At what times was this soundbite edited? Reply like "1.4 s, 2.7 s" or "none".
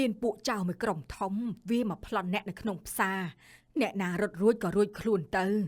none